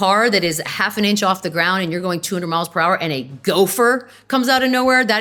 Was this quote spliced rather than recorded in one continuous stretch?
no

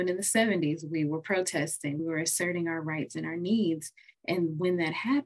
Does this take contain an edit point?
yes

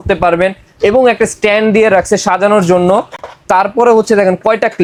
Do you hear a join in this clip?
no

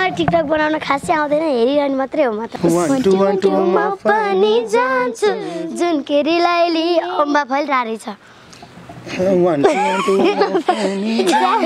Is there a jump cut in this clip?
yes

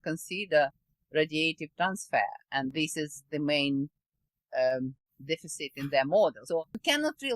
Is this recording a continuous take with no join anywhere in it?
no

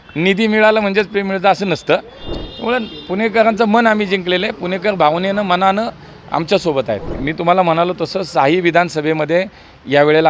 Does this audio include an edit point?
yes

